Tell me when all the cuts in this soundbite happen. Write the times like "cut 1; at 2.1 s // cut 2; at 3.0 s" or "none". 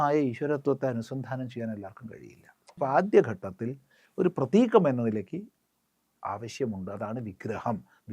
cut 1; at 2.7 s